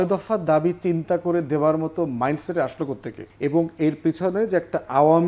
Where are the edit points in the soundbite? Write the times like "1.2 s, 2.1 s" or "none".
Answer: 3.2 s